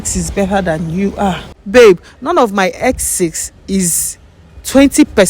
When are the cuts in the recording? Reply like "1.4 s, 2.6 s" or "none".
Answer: 1.6 s